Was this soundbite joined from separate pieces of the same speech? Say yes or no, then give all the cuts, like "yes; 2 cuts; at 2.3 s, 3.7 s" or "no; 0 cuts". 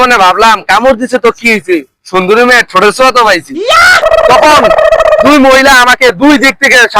yes; 1 cut; at 3.9 s